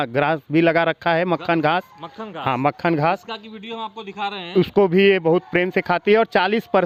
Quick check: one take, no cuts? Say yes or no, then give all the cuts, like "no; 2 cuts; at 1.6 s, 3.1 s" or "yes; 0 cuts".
yes; 0 cuts